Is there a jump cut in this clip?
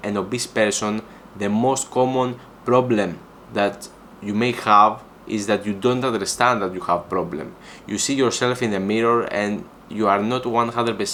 no; 0 cuts

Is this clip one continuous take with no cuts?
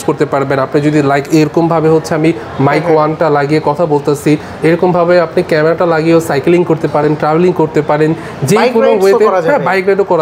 yes; 0 cuts

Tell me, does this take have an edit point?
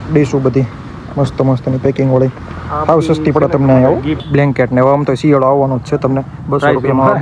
yes; 1 cut; at 4.2 s

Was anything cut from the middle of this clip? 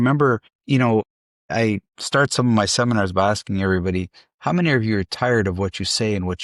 no; 0 cuts

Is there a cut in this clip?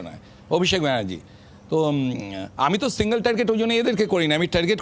no; 0 cuts

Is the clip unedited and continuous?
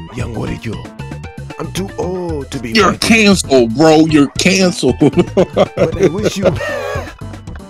yes; 0 cuts

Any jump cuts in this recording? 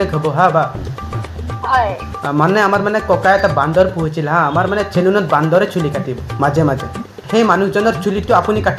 yes; 1 cut; at 7.2 s

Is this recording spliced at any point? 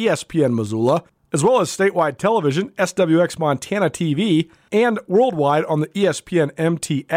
yes; 2 cuts; at 1.2 s, 4.6 s

